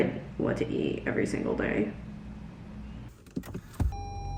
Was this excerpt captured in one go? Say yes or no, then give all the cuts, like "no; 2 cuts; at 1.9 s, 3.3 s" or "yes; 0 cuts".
yes; 0 cuts